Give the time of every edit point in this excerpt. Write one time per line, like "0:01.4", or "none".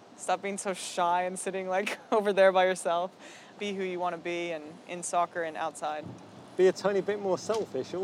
0:03.5